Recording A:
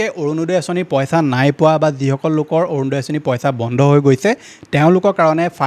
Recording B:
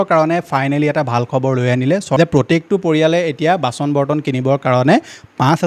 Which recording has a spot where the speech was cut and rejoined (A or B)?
B